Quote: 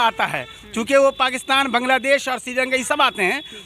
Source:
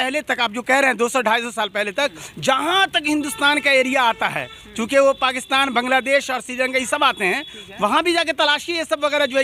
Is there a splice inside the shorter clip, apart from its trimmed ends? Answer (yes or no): no